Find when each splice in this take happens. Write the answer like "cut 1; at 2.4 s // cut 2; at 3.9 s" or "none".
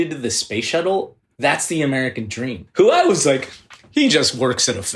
cut 1; at 1.2 s // cut 2; at 2.6 s

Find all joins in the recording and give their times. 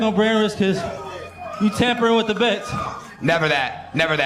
none

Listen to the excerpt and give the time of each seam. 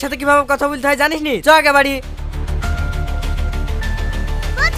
none

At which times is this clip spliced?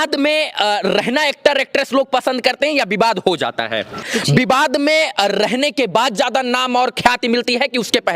cut 1; at 4.1 s

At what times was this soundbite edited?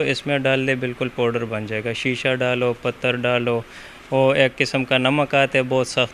none

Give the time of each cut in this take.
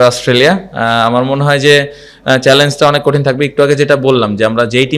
none

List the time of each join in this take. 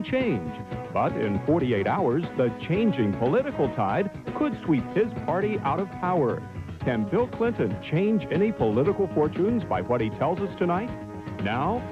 none

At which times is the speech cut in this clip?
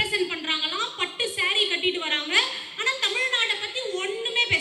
none

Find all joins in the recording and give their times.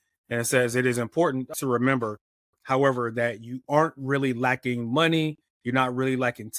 cut 1; at 1.5 s

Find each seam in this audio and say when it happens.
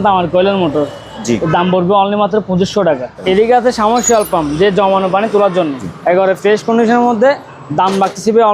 cut 1; at 3.1 s // cut 2; at 5.8 s

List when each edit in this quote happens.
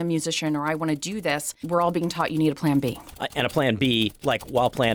cut 1; at 1.6 s

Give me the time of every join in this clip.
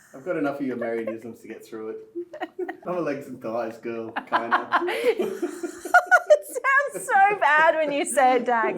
cut 1; at 2.8 s

